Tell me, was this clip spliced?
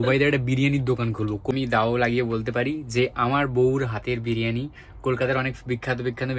yes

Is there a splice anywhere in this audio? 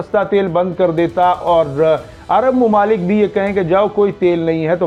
no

